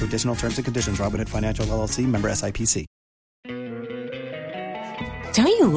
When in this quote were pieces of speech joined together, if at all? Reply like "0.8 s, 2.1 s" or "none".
3.5 s